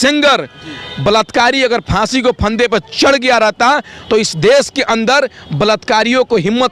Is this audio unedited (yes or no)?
yes